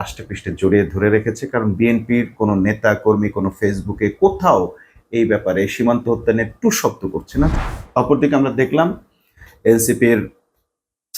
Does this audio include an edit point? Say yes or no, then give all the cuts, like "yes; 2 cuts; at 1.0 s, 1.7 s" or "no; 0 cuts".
yes; 1 cut; at 7.5 s